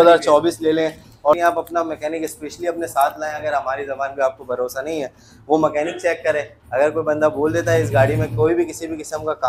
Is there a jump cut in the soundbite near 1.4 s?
yes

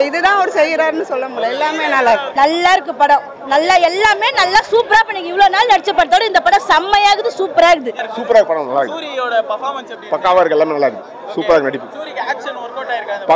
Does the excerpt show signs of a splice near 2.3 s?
yes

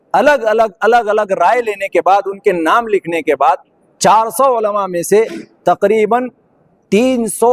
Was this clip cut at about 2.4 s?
no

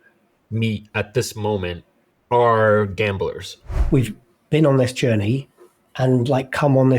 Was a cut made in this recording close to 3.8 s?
yes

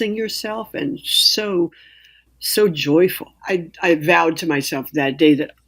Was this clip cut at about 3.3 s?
yes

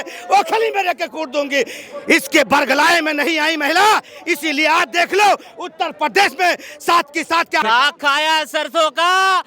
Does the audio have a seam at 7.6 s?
yes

